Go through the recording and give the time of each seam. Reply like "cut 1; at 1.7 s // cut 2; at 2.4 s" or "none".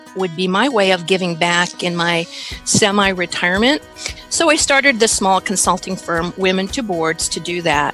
none